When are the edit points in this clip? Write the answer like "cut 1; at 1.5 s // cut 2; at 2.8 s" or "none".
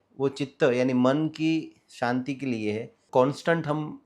cut 1; at 3.0 s